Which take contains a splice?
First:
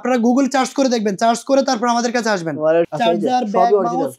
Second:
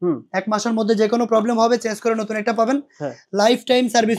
first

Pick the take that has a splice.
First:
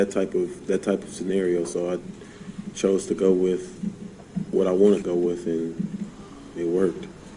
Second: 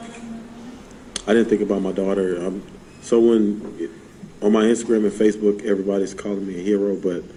first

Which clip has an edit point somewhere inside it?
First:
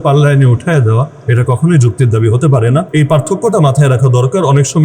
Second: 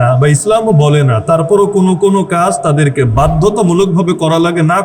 first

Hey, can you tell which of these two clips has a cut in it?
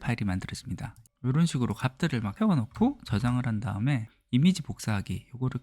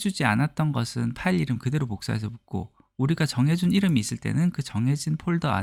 first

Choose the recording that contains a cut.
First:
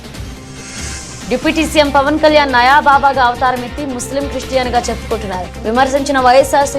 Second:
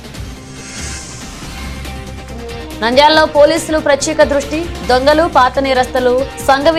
first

